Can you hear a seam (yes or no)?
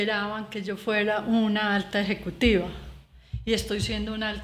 no